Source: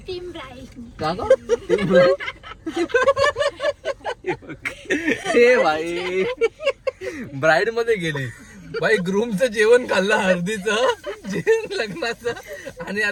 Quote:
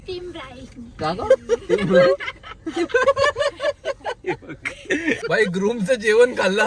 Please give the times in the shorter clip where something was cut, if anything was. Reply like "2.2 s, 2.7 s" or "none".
5.2 s